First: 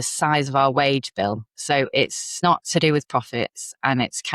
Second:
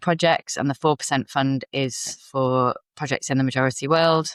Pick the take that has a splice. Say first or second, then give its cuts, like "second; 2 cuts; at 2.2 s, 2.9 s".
first; 1 cut; at 2.4 s